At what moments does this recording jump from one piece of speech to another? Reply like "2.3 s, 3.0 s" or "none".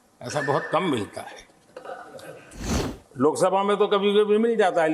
2.9 s